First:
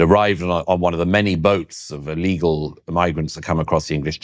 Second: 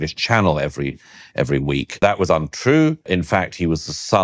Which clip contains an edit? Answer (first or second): second